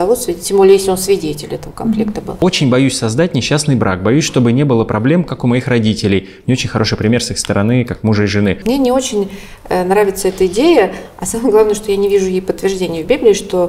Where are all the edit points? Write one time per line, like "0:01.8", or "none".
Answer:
0:02.4
0:08.6